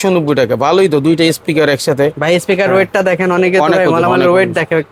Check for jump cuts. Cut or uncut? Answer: uncut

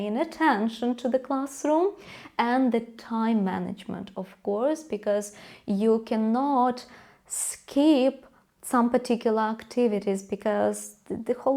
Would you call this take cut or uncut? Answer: uncut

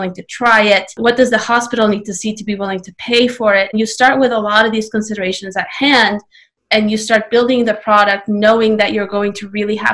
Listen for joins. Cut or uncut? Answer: cut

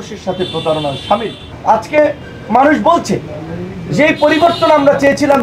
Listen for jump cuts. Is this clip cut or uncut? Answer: uncut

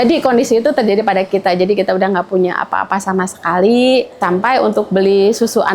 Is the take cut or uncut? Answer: cut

